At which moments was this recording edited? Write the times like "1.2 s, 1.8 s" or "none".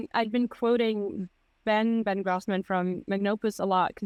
none